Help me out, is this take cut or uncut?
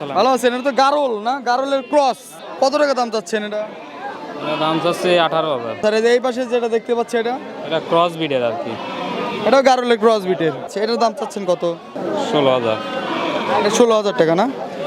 uncut